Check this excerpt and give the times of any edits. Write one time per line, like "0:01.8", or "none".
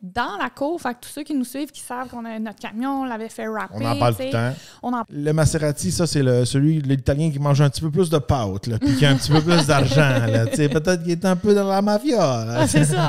0:05.0

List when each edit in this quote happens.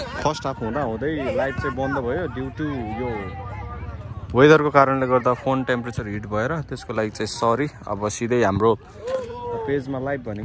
none

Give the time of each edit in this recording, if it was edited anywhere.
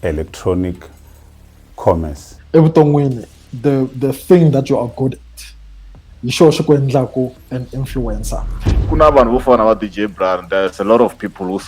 0:02.3
0:08.7

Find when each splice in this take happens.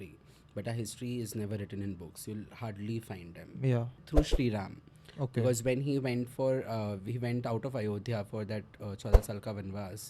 0:04.0

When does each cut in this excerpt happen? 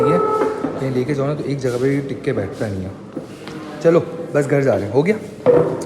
none

